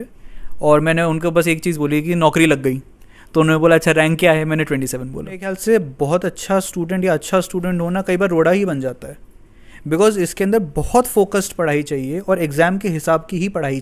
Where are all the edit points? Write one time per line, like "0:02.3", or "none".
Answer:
0:05.6